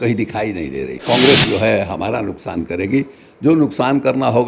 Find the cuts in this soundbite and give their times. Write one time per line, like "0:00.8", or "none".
0:01.0